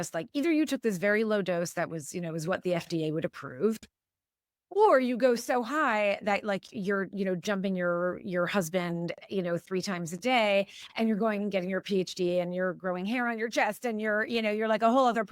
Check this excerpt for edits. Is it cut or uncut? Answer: cut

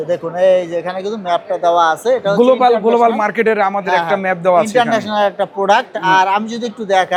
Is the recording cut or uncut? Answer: uncut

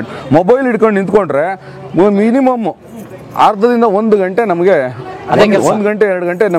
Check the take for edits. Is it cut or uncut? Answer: uncut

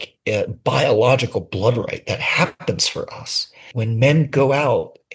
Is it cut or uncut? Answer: cut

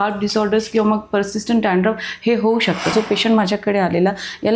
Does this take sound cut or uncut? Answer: cut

